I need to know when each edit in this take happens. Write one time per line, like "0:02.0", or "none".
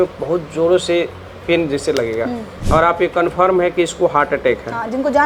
0:02.5